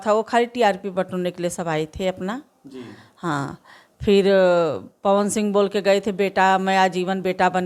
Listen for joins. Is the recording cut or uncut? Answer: uncut